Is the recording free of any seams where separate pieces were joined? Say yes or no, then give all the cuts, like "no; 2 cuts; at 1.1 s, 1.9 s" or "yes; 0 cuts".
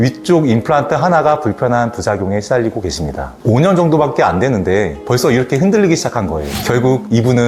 no; 1 cut; at 3.4 s